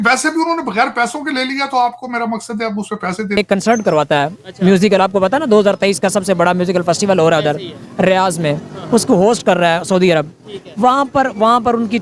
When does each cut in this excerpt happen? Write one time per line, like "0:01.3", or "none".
0:03.4